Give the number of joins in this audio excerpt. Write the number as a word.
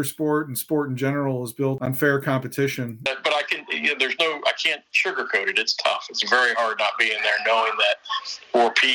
two